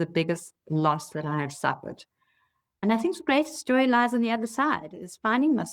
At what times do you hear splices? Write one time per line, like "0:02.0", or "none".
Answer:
0:02.8